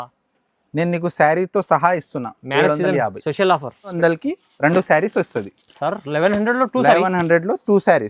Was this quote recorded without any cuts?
no; 1 cut; at 4.0 s

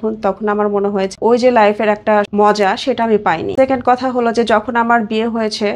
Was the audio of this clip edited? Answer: yes; 3 cuts; at 1.1 s, 2.3 s, 3.5 s

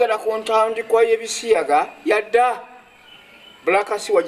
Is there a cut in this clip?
no; 0 cuts

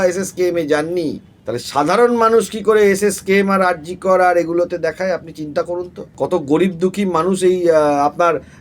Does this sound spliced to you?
yes; 2 cuts; at 1.3 s, 6.0 s

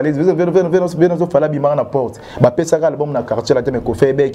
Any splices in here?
no; 0 cuts

